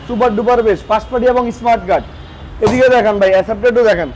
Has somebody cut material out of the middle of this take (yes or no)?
no